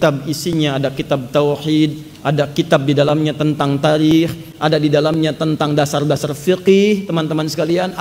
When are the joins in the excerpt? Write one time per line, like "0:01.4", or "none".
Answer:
none